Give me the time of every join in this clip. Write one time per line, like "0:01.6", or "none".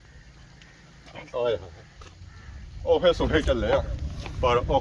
none